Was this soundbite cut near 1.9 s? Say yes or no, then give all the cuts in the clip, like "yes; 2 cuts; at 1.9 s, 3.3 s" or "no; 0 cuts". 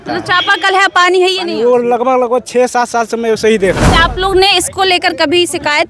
no; 1 cut; at 3.9 s